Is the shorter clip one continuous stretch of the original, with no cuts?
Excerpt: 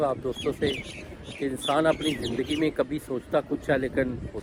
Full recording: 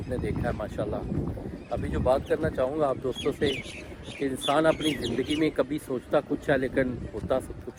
yes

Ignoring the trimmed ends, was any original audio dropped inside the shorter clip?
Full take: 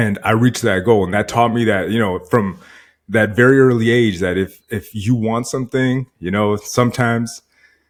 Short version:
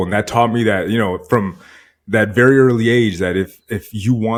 no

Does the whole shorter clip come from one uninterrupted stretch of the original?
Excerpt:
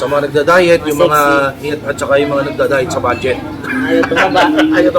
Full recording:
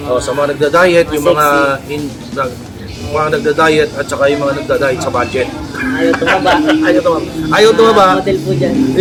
no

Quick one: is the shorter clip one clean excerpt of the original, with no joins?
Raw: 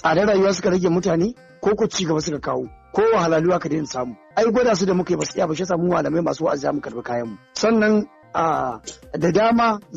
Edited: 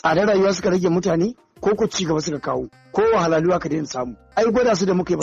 yes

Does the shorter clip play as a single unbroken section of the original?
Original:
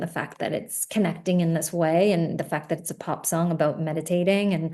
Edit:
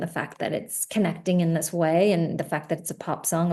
yes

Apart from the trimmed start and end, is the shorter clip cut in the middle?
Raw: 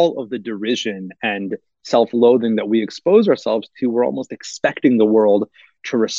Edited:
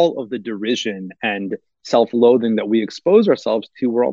no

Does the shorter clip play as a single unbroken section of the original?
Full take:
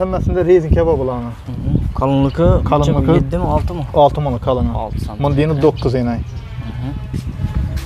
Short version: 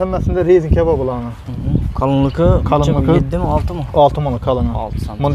yes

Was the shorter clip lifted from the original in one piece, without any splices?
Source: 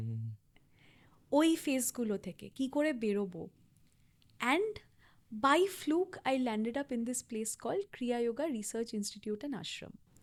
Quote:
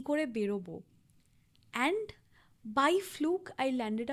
yes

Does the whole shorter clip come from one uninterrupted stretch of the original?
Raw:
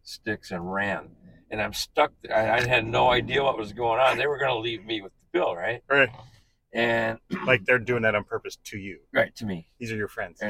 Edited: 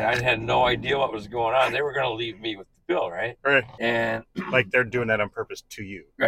no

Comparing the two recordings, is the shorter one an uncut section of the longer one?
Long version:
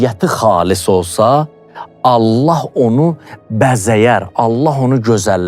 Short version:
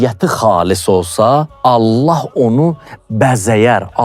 no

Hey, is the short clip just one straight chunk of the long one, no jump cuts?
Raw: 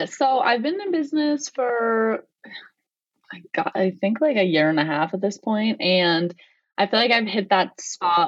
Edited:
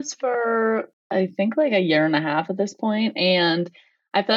no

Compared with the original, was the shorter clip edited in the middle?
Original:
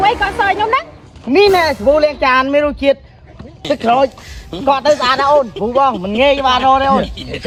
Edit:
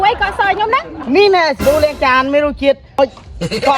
yes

